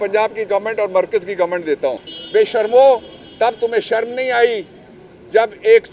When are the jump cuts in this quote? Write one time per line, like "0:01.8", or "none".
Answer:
0:02.1

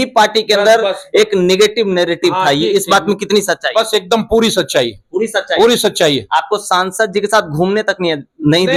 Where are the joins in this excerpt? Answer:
none

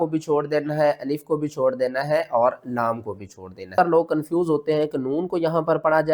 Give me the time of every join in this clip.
0:03.7

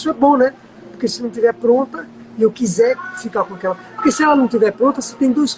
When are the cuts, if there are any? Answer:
none

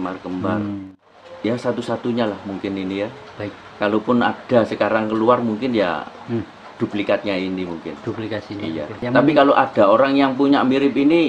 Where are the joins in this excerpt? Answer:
0:00.8
0:09.0

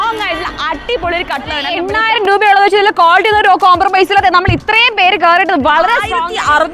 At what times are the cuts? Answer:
0:02.0
0:05.9

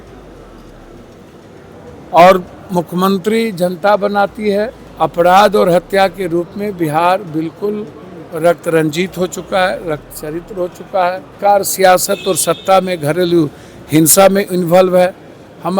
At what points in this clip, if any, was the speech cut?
0:04.8
0:11.4

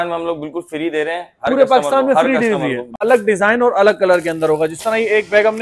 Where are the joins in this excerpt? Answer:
0:03.0

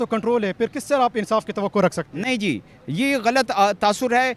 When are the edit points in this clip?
none

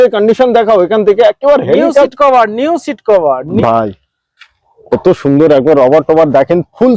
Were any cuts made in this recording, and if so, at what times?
0:03.6

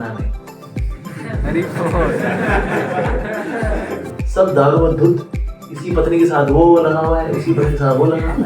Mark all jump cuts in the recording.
0:04.1

